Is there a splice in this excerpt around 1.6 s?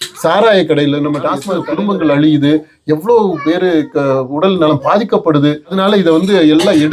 yes; 2 cuts; at 1.6 s, 5.8 s

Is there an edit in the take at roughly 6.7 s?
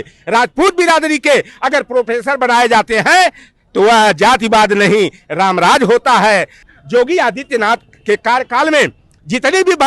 yes; 1 cut; at 6.7 s

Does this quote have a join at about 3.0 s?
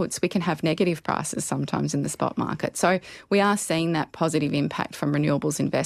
yes; 1 cut; at 3.0 s

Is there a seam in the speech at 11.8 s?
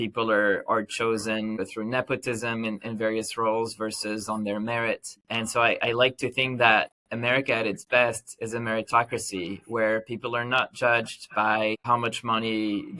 yes; 1 cut; at 11.8 s

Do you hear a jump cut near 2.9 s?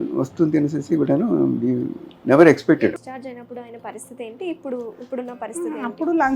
yes; 1 cut; at 2.9 s

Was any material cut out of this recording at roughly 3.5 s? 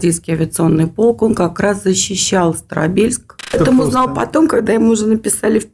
yes; 1 cut; at 3.5 s

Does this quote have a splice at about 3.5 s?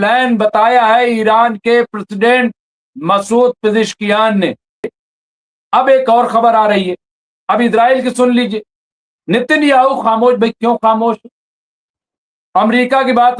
no; 1 cut; at 5.0 s

